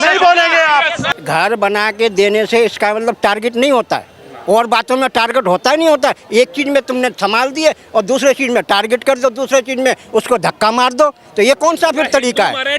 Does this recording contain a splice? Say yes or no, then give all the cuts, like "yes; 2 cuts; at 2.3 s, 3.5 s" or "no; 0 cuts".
yes; 1 cut; at 1.0 s